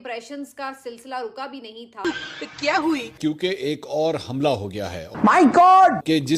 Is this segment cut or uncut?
cut